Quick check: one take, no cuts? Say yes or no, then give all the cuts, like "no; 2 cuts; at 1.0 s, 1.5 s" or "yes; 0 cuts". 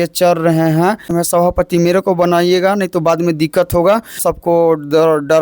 no; 2 cuts; at 1.1 s, 4.2 s